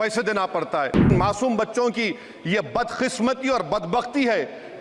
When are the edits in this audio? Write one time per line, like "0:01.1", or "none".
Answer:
0:01.1